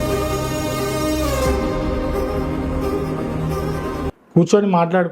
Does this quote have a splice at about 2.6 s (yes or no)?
no